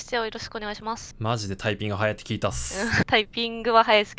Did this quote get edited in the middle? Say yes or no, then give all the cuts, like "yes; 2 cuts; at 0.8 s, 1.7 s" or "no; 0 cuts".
yes; 2 cuts; at 1.1 s, 3.0 s